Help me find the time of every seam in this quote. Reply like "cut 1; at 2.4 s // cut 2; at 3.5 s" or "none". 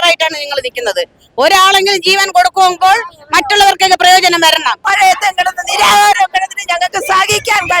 cut 1; at 4.8 s